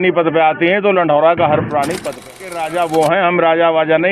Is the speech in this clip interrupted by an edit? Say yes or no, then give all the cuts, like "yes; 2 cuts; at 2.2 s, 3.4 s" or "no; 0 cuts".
yes; 1 cut; at 2.1 s